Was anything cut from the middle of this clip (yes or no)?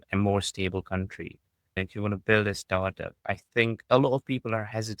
yes